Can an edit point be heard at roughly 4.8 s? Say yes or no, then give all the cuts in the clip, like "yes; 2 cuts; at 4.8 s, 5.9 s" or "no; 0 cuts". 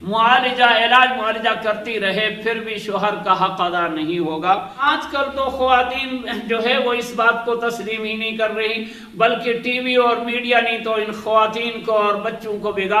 yes; 1 cut; at 4.8 s